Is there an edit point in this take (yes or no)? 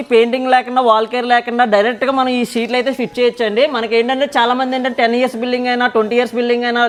no